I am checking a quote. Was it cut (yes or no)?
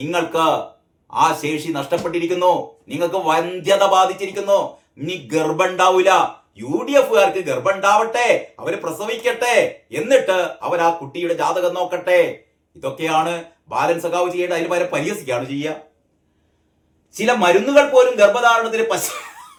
no